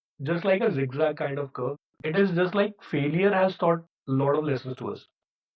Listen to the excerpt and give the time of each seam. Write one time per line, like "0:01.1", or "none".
0:01.8